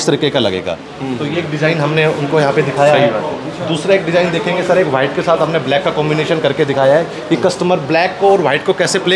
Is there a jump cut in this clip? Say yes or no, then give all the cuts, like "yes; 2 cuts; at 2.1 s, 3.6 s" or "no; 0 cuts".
no; 0 cuts